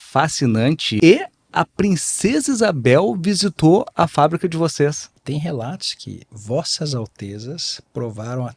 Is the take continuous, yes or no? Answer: no